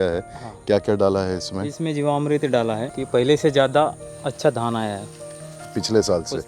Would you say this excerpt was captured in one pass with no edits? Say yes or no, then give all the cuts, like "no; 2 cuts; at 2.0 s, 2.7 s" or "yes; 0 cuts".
no; 1 cut; at 2.9 s